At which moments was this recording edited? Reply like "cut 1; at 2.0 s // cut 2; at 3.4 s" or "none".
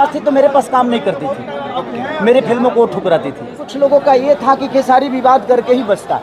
cut 1; at 3.6 s